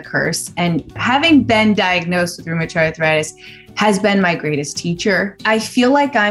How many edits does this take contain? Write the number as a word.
two